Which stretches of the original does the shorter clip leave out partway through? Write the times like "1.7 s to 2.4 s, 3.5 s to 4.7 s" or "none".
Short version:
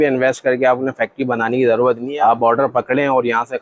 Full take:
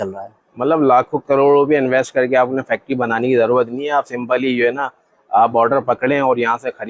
3.8 s to 5.2 s

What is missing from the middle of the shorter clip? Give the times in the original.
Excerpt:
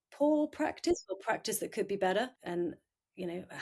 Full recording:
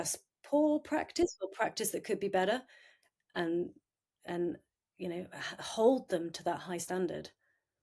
2.7 s to 4.2 s

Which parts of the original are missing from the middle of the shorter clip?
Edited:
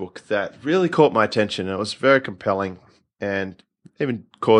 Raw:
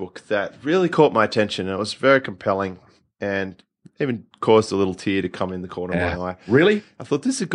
none

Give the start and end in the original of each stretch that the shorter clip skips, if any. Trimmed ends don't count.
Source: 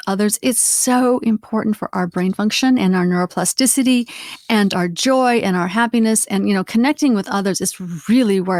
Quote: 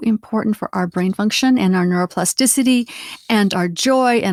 none

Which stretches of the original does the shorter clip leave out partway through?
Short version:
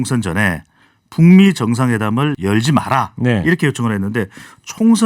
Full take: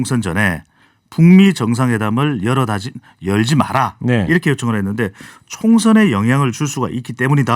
2.4 s to 3.2 s

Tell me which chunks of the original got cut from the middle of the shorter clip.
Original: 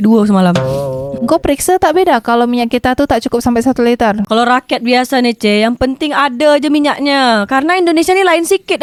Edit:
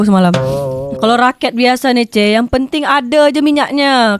1.2 s to 4.2 s

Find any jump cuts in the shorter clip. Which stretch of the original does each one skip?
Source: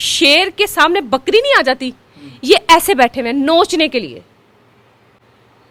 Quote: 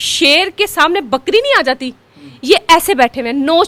none

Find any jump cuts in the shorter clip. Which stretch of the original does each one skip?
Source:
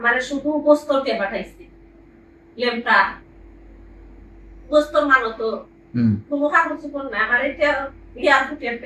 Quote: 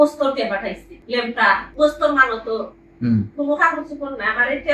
1.6 s to 2.4 s, 3.2 s to 4.6 s

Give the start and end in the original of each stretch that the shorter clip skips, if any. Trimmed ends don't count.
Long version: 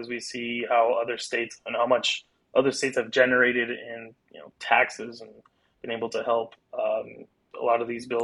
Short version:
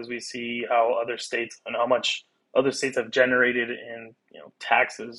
none

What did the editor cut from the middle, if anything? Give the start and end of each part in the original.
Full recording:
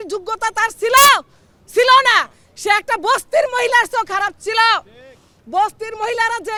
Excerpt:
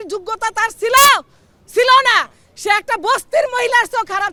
none

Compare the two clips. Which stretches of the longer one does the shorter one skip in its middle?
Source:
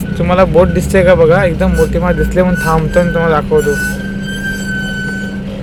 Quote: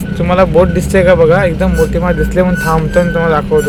none

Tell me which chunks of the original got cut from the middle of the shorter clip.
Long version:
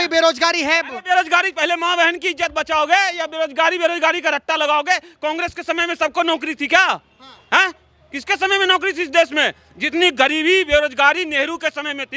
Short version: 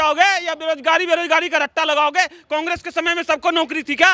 none

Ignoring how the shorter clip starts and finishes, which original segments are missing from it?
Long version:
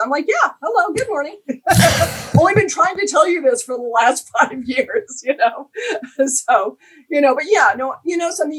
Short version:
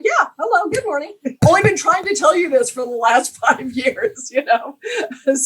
1.5 s to 2.2 s

